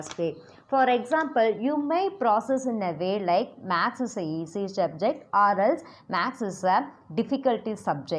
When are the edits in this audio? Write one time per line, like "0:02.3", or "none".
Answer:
0:03.6